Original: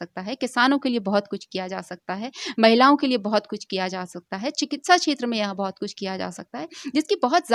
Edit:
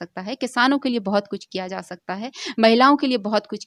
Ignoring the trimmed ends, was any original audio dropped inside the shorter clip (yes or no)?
no